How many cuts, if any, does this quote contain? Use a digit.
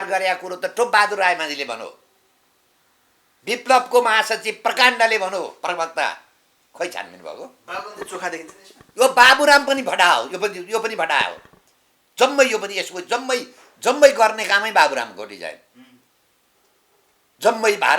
0